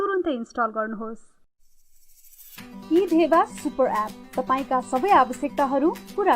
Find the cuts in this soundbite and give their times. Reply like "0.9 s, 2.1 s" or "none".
1.3 s